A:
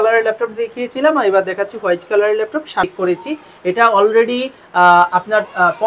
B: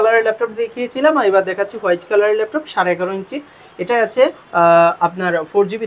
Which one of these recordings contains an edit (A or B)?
A